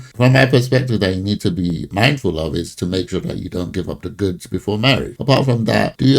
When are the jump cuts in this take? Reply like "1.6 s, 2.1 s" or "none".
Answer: 1.8 s, 5.1 s